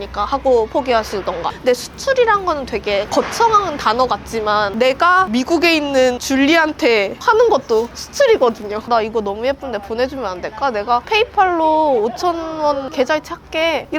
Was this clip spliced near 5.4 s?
no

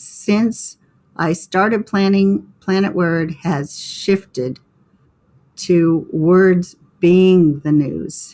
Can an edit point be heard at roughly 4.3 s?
no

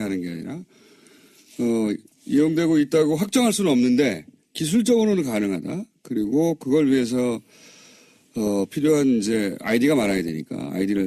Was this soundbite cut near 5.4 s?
yes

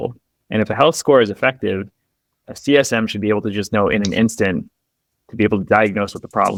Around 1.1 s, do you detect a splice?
no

